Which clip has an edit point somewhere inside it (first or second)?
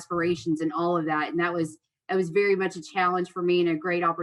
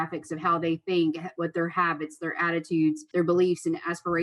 second